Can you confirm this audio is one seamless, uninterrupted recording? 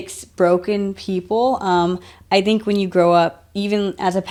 yes; 0 cuts

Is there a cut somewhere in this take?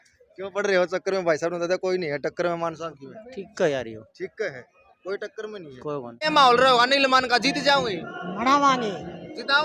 yes; 1 cut; at 6.1 s

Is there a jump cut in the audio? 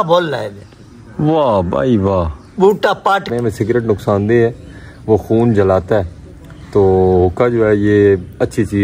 yes; 1 cut; at 3.3 s

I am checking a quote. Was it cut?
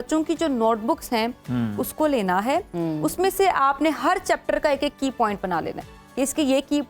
no; 0 cuts

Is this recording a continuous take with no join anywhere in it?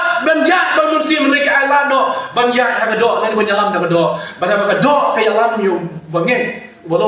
yes; 0 cuts

